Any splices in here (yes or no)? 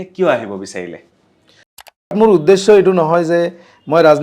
yes